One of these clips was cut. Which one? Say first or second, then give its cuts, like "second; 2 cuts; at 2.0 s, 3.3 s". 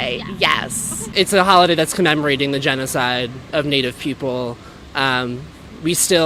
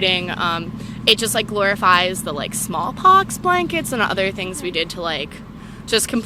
first; 1 cut; at 1.1 s